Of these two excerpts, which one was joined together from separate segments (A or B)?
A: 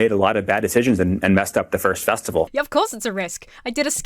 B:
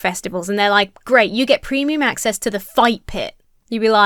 A